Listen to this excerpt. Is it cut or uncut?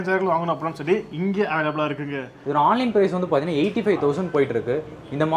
cut